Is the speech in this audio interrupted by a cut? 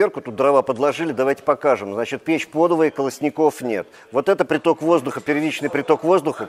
no; 0 cuts

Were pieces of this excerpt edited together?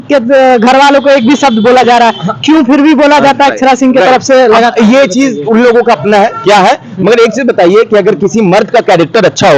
no; 0 cuts

